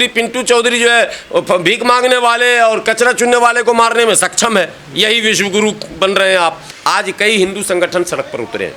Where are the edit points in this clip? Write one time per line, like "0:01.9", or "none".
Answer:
0:06.7